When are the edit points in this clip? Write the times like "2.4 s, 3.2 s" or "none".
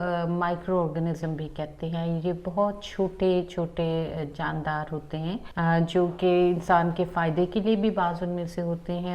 5.5 s